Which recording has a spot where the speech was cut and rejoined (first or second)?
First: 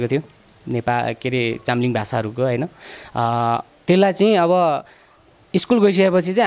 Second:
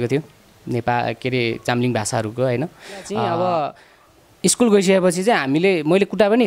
second